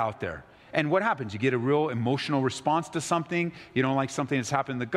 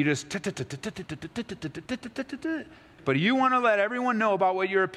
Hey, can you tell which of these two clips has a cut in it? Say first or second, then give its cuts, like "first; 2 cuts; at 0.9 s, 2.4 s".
second; 1 cut; at 2.9 s